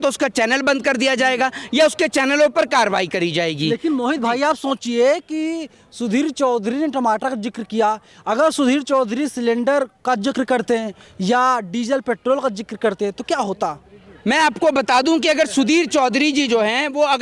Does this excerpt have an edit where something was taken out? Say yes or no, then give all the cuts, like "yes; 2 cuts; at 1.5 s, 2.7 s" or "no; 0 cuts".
no; 0 cuts